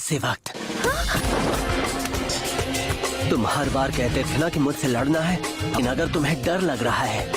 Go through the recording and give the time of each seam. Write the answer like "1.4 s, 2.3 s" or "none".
1.2 s